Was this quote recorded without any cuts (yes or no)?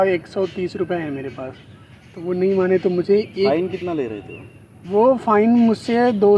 yes